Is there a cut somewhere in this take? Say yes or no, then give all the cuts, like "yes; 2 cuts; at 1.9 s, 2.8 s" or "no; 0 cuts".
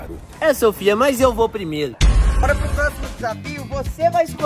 yes; 1 cut; at 2.2 s